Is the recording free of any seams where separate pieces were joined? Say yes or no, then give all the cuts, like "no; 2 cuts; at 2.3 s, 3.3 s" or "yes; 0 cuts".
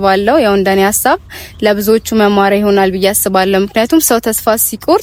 yes; 0 cuts